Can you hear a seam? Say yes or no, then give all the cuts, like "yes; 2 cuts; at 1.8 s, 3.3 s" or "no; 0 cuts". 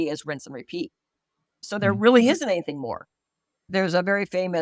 yes; 1 cut; at 1.6 s